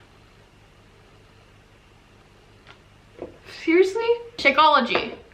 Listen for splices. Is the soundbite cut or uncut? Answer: cut